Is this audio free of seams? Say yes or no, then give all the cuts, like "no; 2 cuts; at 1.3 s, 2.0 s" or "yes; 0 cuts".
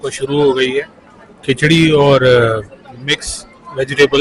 yes; 0 cuts